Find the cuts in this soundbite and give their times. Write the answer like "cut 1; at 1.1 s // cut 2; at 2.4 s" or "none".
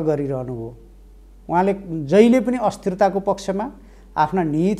none